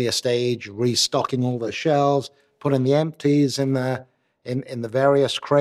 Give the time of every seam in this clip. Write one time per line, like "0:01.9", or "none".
0:01.7